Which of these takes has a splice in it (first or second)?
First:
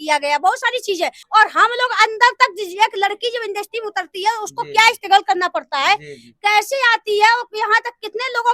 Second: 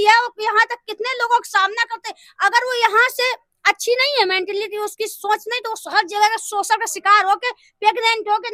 first